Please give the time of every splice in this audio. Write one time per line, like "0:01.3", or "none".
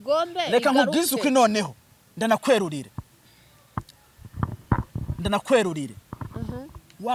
none